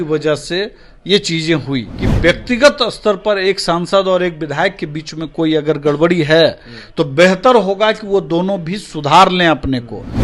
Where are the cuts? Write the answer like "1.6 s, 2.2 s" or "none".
2.0 s